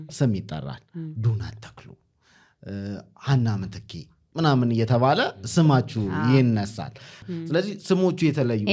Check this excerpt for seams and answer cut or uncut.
cut